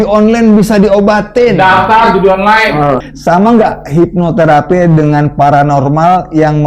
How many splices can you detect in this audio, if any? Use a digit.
1